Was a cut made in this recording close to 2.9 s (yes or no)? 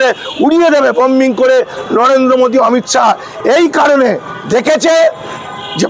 no